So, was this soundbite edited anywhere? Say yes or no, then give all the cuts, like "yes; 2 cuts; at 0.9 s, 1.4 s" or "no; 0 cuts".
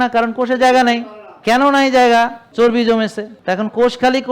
yes; 3 cuts; at 1.4 s, 2.4 s, 3.3 s